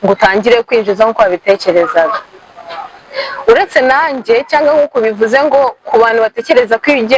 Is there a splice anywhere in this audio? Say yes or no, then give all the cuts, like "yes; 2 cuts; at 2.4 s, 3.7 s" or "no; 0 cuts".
no; 0 cuts